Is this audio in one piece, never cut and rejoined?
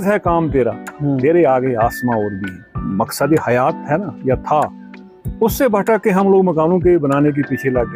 yes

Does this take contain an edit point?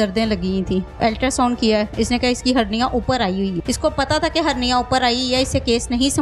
yes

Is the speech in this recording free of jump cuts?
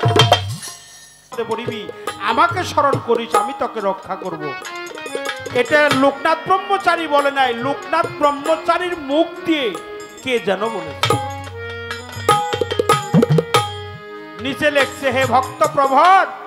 no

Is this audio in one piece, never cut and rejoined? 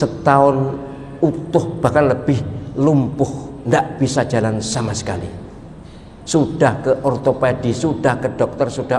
yes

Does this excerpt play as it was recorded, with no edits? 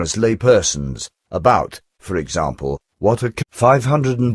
yes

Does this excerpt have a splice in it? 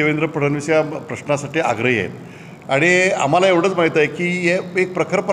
no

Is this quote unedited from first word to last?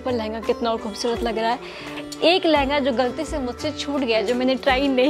no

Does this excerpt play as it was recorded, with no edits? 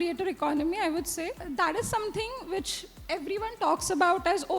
no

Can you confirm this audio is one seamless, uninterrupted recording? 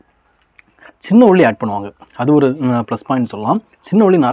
yes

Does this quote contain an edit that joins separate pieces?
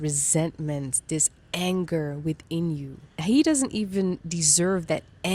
no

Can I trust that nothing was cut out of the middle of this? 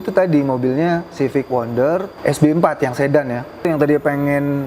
no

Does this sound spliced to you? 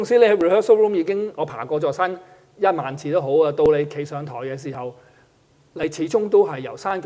no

